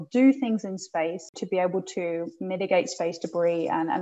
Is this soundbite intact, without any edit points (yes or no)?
no